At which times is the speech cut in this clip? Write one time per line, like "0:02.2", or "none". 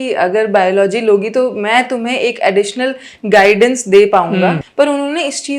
0:04.6